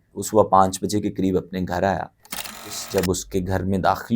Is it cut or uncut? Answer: cut